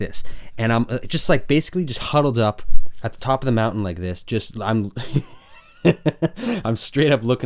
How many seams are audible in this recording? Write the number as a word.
zero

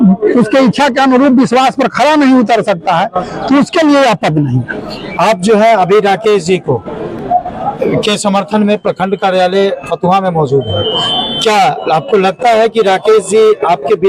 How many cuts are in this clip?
zero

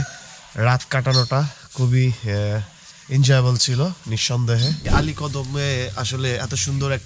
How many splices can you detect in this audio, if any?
one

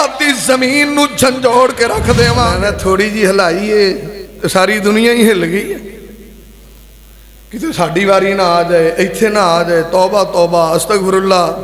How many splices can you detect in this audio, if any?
one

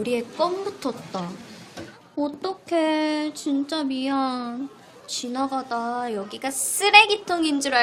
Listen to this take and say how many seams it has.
zero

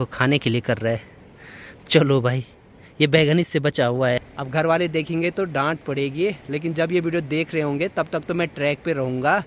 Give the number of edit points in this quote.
one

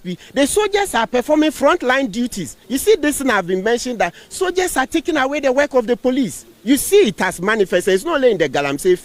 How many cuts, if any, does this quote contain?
zero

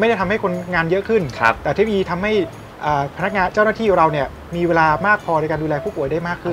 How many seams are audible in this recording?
zero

